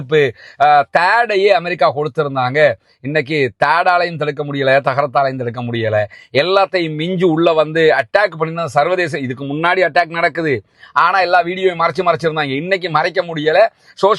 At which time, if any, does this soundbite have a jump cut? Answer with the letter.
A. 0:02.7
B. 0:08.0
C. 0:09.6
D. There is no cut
D